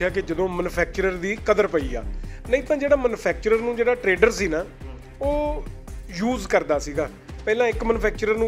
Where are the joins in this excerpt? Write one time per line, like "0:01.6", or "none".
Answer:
none